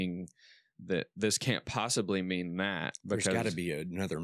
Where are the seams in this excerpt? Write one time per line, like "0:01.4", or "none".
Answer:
none

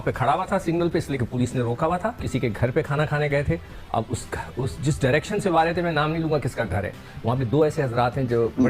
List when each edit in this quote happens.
0:02.2

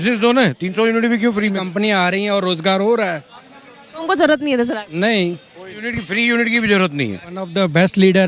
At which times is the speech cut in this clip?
0:01.6
0:05.9
0:07.5

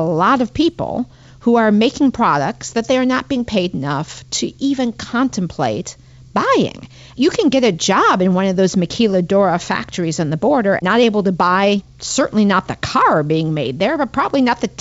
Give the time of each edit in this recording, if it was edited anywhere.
0:07.1
0:10.8
0:12.0

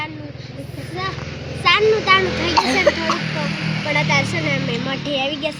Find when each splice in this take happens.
none

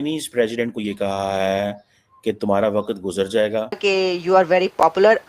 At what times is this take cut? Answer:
0:03.8

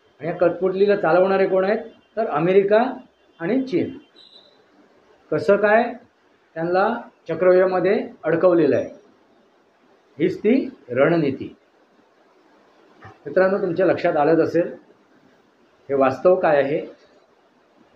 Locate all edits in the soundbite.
0:04.2

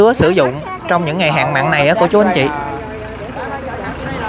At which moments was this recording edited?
none

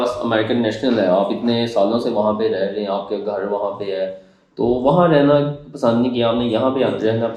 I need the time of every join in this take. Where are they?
none

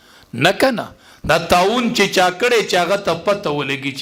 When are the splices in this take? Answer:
none

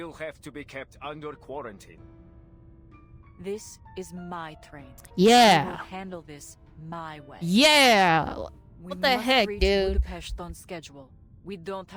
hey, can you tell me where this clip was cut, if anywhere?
none

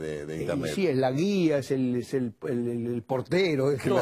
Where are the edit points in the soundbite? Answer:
0:02.4

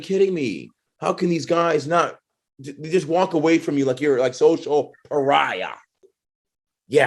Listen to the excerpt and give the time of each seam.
0:05.8

